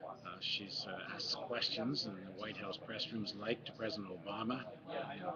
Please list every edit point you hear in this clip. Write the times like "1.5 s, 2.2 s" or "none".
1.6 s